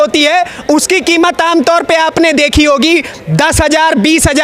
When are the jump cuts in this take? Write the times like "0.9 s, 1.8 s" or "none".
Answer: none